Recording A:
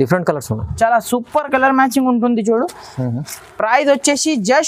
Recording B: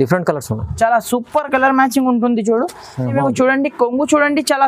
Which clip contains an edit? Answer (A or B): B